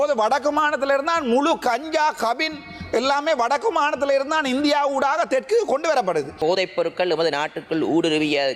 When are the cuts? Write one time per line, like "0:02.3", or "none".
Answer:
0:06.3